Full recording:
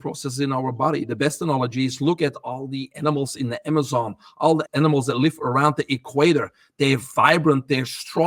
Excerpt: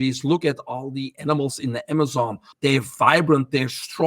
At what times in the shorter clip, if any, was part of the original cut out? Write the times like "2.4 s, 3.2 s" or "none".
2.4 s